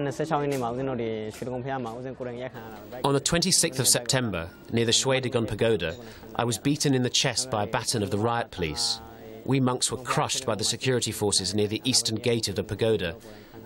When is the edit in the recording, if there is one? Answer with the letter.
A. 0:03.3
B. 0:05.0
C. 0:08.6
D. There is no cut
B